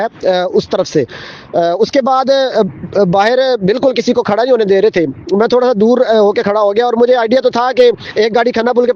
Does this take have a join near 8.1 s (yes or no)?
yes